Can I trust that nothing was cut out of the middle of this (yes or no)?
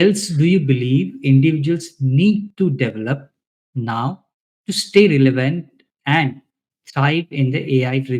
yes